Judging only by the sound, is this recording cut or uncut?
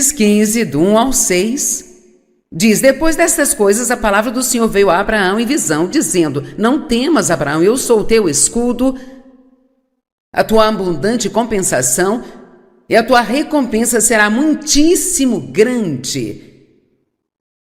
cut